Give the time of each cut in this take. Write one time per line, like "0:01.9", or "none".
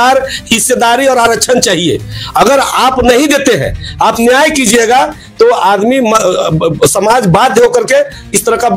0:04.2